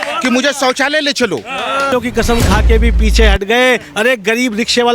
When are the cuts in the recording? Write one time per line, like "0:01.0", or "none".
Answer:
0:01.9